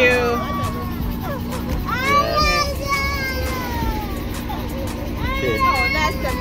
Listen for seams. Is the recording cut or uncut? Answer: uncut